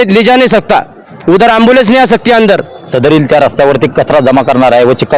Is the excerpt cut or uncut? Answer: cut